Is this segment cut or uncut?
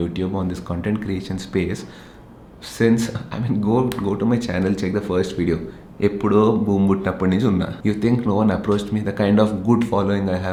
uncut